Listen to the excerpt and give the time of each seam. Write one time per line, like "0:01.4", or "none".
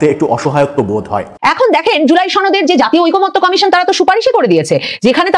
0:01.2